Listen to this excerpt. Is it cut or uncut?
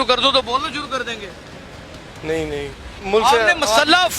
cut